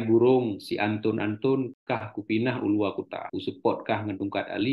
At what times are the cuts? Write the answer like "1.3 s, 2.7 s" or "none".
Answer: 1.8 s, 3.2 s